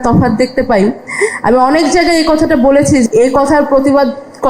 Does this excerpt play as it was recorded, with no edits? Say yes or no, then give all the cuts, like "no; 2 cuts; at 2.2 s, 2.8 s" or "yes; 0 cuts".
no; 1 cut; at 3.1 s